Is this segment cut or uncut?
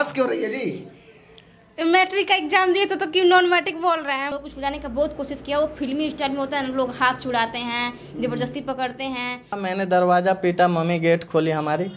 cut